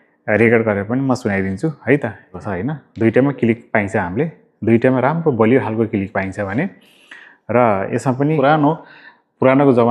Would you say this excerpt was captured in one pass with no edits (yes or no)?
no